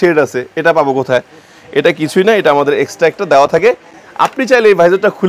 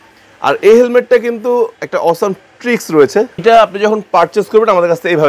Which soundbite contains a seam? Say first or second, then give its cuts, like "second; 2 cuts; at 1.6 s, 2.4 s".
second; 1 cut; at 3.4 s